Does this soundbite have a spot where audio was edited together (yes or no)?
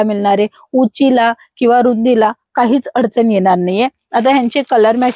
no